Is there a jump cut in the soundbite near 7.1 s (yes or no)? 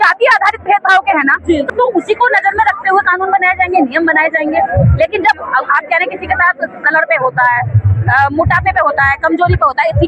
no